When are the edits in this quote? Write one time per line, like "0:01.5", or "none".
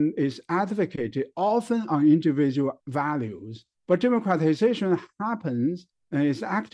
0:02.8